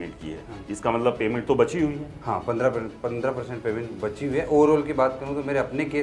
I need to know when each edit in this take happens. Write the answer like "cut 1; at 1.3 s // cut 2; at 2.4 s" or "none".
none